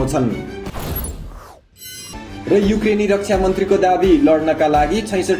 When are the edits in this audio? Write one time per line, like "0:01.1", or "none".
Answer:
none